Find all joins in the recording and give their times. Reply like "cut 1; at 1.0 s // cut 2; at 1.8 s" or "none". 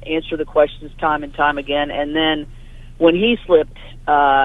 none